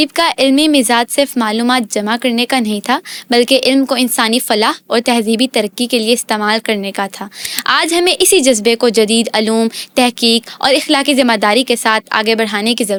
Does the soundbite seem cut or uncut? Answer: uncut